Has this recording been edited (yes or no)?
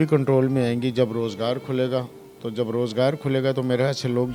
no